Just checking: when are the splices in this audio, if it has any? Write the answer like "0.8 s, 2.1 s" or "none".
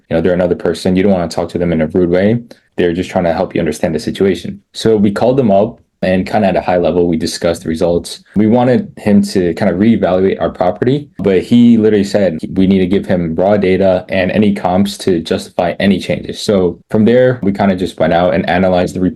none